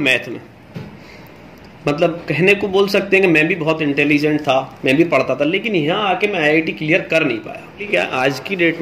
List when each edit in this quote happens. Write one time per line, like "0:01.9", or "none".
0:07.8